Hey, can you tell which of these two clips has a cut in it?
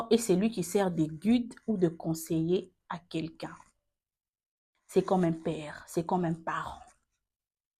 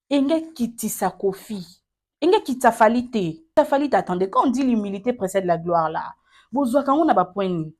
second; 1 cut; at 3.5 s

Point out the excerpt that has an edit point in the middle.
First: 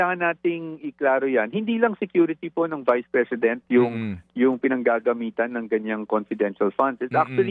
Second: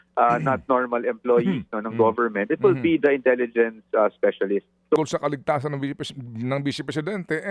second; 1 cut; at 5.0 s

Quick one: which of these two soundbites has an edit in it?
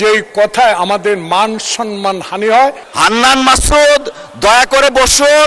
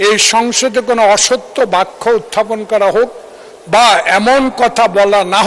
first; 1 cut; at 2.8 s

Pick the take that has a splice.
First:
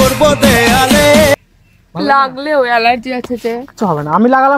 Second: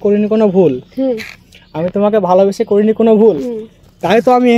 first; 1 cut; at 1.3 s

